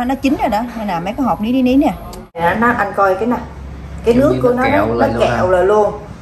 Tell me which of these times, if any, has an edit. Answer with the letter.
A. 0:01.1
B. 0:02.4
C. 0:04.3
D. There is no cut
B